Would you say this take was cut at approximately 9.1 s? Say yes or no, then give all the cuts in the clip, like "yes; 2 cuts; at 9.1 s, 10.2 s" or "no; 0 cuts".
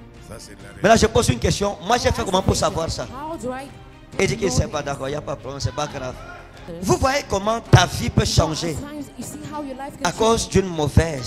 no; 1 cut; at 6.6 s